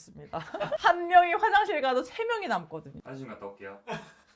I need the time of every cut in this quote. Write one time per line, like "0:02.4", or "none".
0:00.8
0:03.0